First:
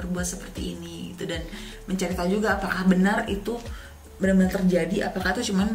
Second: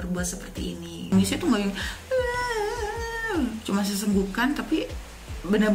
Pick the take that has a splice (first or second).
second